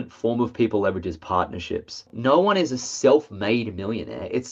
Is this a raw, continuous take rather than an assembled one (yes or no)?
no